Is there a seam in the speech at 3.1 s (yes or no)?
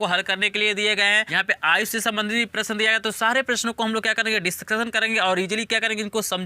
no